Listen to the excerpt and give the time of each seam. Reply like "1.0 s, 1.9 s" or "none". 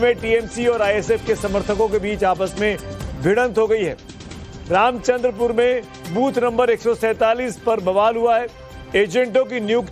1.0 s